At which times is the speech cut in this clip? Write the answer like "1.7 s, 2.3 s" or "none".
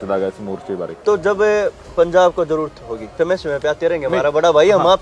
1.0 s, 3.1 s